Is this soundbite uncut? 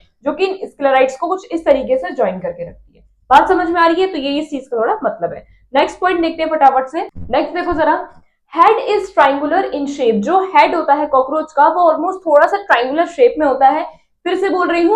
yes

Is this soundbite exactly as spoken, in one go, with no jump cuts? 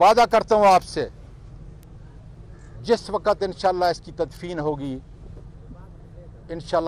yes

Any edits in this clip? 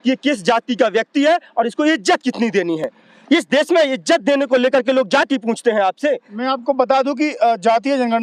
no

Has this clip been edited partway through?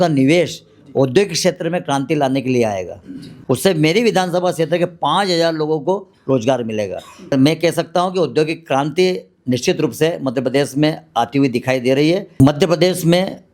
yes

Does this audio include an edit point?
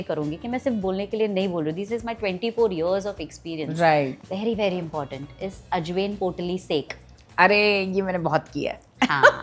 yes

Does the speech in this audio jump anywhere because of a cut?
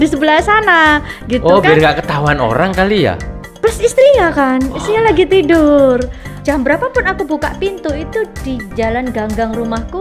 yes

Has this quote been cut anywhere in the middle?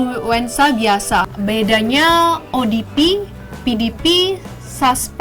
yes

